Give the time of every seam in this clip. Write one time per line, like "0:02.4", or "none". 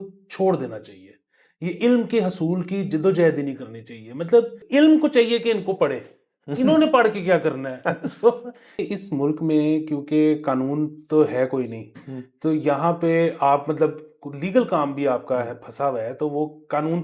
0:04.6
0:08.7